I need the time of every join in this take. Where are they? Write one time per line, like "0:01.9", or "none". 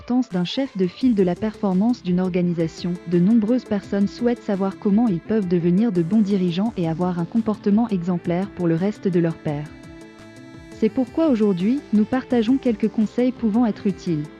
none